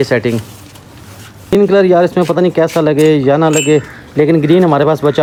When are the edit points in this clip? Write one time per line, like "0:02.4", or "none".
none